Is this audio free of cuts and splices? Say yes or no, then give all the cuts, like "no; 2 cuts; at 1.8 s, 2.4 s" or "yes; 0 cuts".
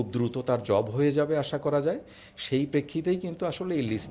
yes; 0 cuts